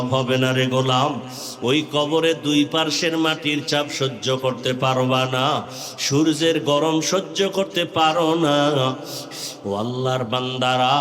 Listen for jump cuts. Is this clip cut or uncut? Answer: cut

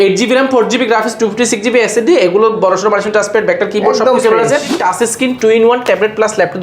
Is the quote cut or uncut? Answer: cut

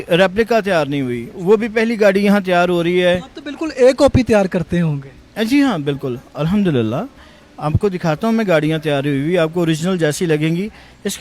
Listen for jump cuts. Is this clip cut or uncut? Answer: uncut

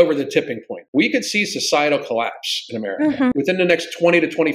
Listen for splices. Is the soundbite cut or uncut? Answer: cut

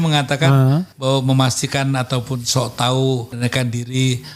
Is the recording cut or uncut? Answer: cut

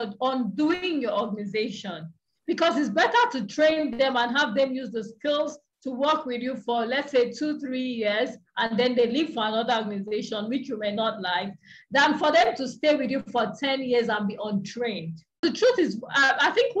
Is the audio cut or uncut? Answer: cut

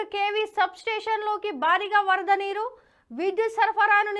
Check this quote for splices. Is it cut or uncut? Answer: uncut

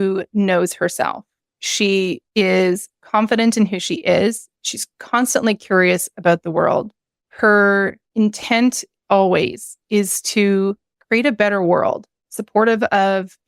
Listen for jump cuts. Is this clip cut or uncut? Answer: uncut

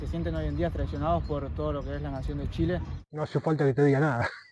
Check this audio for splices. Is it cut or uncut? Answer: uncut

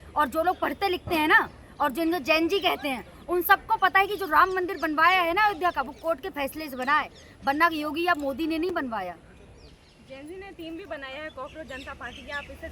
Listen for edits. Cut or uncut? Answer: uncut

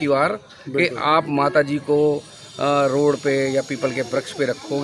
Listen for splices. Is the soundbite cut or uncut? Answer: uncut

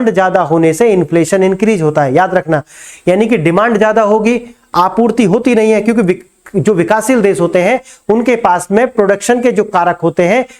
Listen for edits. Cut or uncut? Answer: uncut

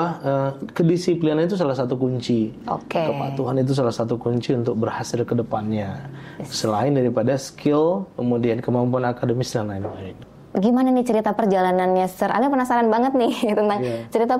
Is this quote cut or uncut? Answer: cut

